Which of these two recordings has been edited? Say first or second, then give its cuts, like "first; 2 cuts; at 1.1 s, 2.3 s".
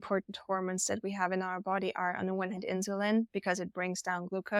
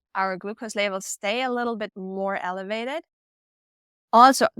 second; 1 cut; at 2.0 s